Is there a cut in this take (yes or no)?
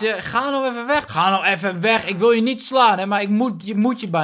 yes